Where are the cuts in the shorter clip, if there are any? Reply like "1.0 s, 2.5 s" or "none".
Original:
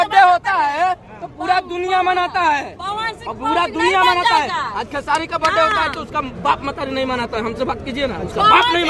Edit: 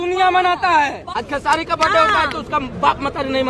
1.1 s